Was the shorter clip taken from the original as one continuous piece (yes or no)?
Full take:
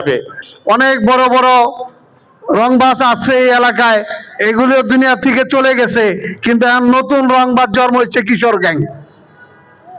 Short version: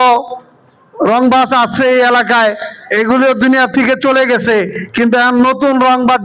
yes